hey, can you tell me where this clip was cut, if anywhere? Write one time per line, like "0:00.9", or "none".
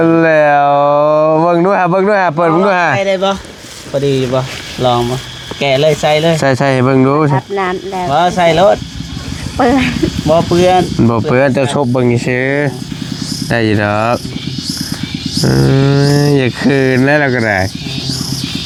none